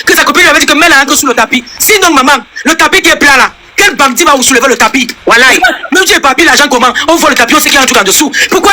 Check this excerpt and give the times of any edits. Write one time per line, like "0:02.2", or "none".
none